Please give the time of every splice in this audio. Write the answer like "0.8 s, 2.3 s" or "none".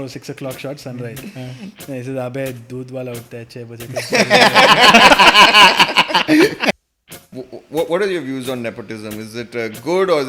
7.0 s

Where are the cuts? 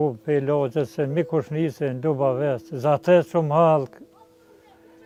none

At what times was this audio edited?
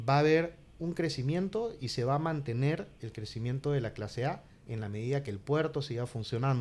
none

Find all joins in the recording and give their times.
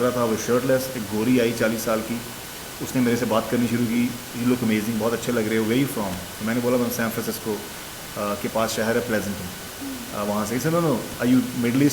none

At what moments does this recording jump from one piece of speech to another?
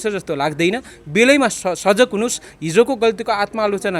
none

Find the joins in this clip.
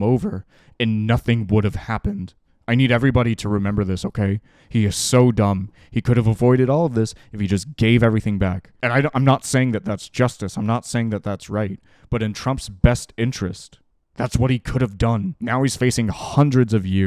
none

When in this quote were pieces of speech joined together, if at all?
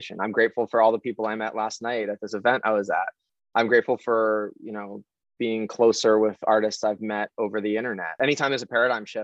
8.1 s

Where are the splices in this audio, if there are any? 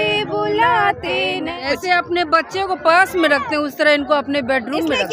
1.6 s

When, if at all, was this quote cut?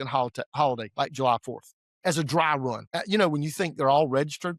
2.9 s

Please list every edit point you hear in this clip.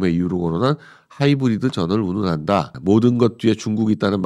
2.7 s

